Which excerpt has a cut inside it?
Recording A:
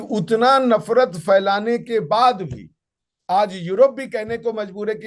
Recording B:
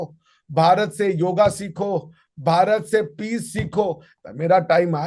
B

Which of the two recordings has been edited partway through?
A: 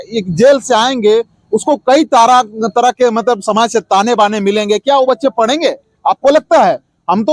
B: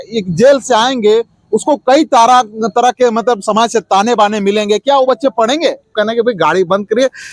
B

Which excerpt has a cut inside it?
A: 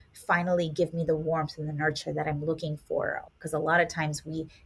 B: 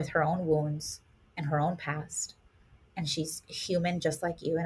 A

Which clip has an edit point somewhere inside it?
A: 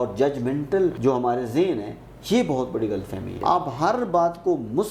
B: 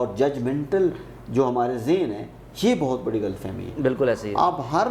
A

